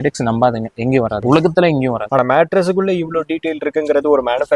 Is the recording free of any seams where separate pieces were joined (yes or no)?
no